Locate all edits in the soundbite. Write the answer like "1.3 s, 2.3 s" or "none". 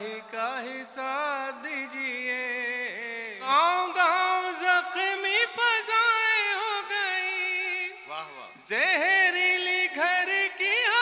3.5 s